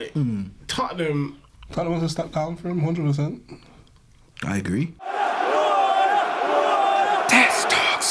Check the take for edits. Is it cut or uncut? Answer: cut